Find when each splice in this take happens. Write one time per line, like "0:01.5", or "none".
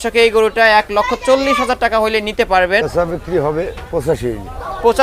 0:02.8